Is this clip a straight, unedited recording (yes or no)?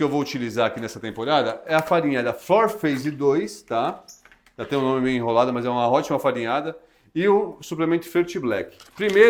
yes